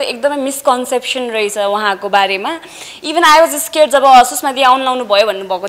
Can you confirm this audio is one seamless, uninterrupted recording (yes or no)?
yes